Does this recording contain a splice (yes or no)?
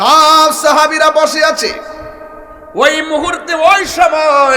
no